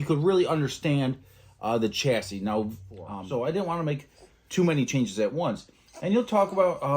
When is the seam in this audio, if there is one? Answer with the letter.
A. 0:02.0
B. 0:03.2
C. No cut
B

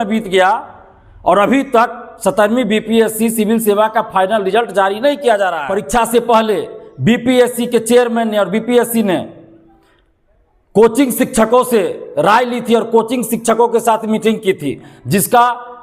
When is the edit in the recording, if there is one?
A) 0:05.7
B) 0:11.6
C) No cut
A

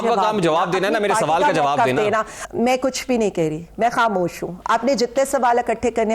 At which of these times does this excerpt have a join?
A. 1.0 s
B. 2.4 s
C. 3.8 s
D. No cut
B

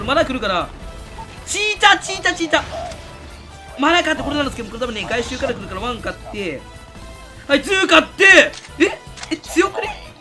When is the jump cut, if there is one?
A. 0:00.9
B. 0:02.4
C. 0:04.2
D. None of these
C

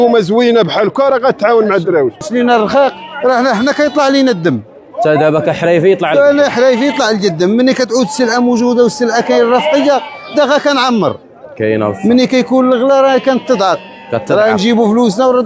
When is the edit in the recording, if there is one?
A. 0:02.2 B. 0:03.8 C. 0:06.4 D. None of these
A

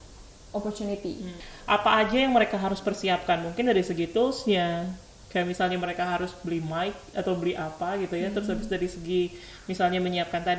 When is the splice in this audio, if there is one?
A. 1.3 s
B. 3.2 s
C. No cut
A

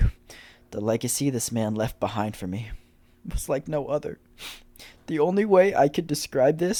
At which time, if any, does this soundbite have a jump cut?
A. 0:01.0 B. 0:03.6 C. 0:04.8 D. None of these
D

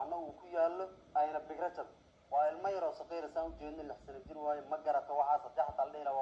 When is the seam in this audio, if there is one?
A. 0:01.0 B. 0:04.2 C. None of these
A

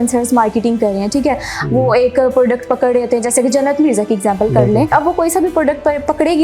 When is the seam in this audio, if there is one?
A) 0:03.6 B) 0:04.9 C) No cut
B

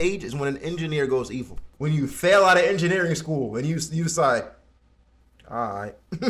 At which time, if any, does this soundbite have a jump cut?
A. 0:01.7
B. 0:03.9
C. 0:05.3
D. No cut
A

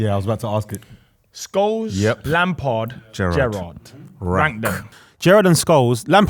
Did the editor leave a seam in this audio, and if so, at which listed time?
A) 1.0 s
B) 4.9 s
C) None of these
B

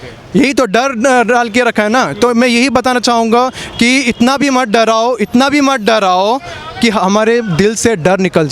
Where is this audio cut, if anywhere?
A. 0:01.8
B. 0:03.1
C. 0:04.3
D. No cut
D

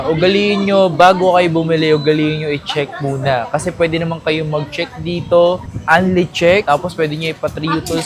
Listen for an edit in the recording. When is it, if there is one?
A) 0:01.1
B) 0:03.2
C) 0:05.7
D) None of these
D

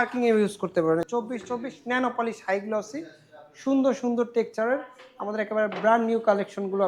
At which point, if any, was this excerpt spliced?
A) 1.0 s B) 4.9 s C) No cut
A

